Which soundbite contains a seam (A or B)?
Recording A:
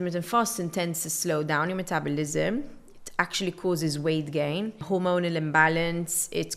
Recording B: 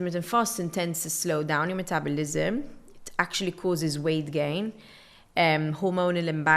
A